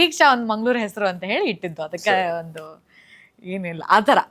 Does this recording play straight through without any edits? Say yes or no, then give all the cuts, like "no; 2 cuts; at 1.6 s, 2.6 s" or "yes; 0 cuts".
yes; 0 cuts